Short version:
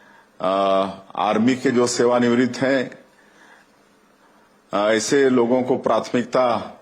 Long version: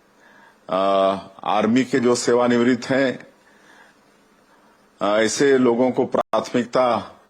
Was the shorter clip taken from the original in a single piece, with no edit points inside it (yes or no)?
no